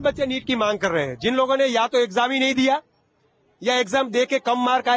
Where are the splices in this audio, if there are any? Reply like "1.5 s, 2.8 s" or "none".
none